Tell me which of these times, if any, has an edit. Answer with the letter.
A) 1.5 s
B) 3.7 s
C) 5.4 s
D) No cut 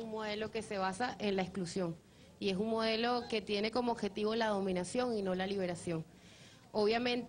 B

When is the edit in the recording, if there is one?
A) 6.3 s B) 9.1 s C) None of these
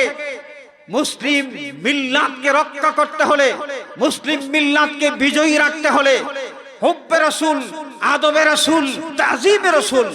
B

